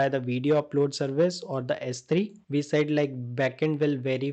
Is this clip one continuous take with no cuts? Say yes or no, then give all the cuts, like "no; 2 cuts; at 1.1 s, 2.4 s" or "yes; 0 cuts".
no; 1 cut; at 2.4 s